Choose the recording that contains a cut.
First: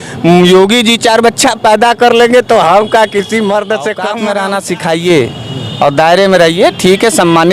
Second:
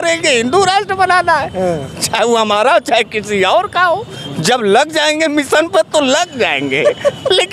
first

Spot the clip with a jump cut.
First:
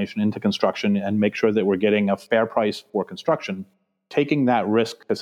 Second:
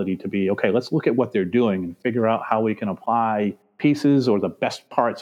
first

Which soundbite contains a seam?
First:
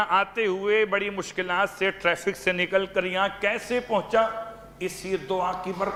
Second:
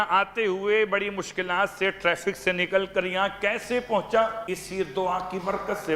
second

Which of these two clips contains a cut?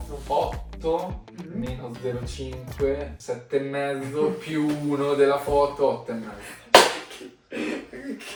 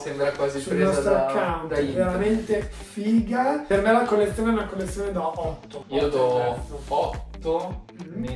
second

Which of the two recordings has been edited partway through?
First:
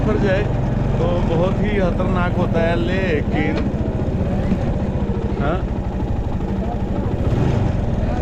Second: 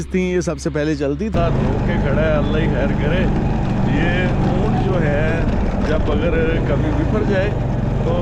second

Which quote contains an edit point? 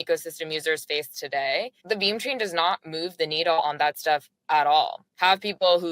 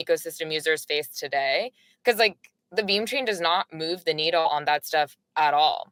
first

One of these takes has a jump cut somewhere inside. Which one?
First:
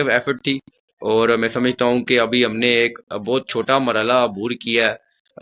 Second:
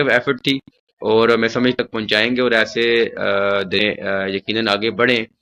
second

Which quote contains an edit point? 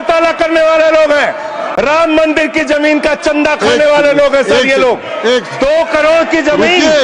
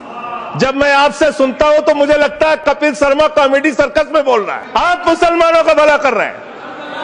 second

